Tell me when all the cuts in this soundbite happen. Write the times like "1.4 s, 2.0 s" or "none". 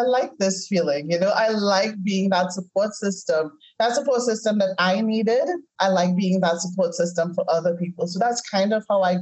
none